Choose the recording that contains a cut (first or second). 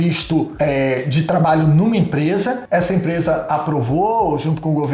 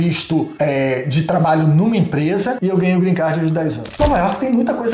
second